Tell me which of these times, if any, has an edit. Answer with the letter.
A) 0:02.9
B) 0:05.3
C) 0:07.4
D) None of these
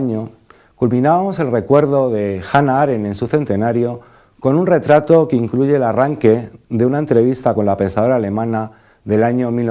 B